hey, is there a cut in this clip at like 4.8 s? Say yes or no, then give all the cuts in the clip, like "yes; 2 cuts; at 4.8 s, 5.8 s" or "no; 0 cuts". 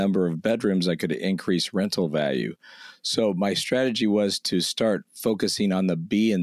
no; 0 cuts